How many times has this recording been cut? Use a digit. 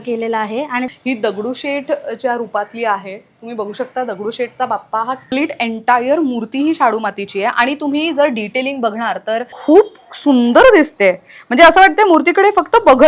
3